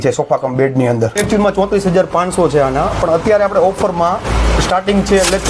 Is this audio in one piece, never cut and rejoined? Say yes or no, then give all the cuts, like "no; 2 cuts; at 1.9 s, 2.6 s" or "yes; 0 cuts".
no; 1 cut; at 1.1 s